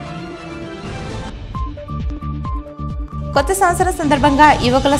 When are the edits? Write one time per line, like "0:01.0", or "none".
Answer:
0:01.3